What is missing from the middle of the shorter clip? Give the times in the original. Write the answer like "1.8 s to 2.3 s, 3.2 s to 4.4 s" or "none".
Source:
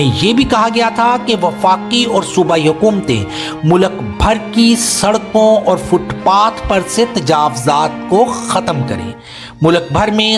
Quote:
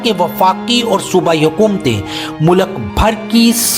none